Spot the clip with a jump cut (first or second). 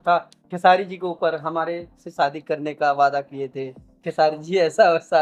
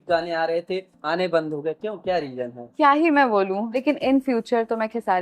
second